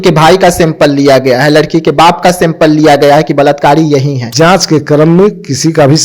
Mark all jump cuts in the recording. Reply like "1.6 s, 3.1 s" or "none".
4.2 s